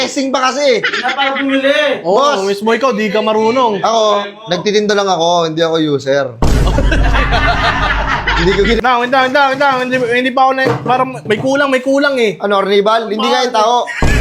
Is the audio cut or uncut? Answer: cut